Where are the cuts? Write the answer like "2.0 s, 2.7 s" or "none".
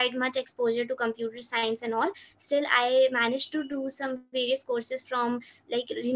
none